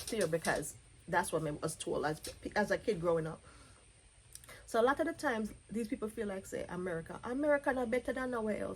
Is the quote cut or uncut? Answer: uncut